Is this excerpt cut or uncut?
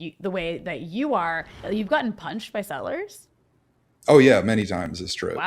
cut